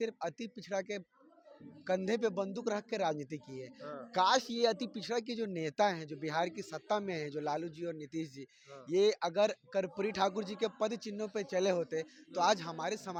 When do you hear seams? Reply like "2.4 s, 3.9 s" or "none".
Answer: none